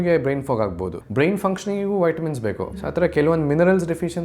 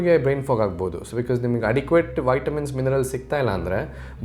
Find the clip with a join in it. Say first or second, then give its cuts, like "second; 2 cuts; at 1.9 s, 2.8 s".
first; 2 cuts; at 0.9 s, 2.7 s